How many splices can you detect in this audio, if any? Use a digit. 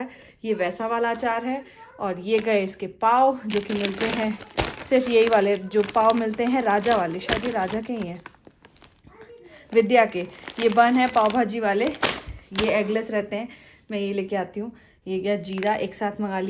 0